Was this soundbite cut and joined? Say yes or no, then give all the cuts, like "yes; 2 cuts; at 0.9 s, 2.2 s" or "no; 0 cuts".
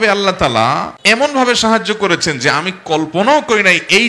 yes; 1 cut; at 0.9 s